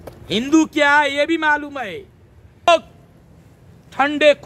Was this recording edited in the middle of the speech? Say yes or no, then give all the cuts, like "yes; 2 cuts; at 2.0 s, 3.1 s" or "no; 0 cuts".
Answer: yes; 1 cut; at 2.7 s